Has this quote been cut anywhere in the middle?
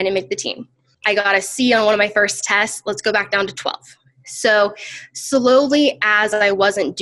yes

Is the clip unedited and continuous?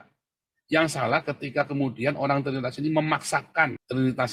yes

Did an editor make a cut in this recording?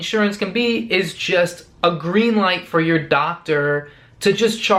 no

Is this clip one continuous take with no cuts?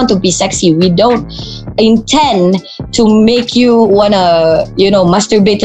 yes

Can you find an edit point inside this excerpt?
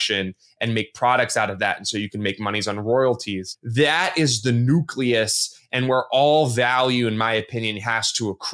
yes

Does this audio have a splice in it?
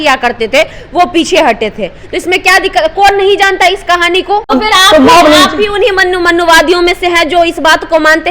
yes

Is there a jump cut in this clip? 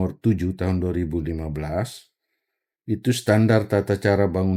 no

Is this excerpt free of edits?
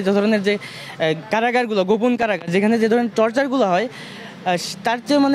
yes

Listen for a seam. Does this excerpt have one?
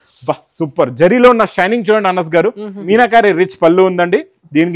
yes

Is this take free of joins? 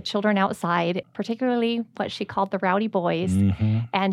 no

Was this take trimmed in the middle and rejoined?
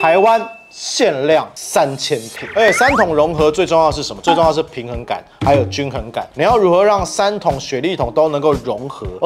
yes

